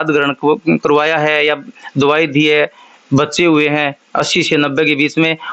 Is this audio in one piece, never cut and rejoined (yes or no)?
yes